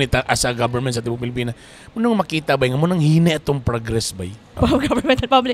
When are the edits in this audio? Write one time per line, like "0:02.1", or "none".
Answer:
0:04.5